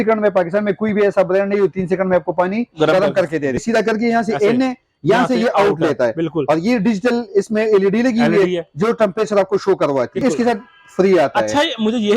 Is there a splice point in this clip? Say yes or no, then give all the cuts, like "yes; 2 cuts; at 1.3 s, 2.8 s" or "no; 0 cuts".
yes; 2 cuts; at 3.6 s, 10.2 s